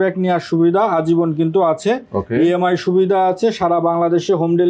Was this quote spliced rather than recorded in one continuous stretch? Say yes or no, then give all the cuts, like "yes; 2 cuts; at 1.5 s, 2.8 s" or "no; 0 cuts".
no; 0 cuts